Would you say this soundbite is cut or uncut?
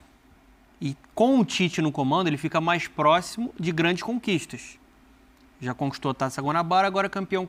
uncut